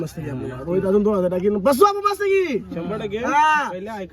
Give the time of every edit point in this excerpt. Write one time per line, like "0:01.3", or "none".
none

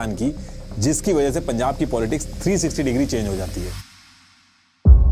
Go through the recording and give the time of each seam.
none

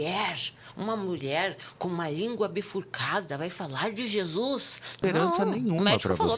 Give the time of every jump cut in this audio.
0:04.9

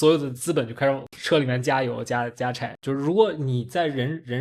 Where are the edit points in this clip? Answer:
0:01.1
0:02.7

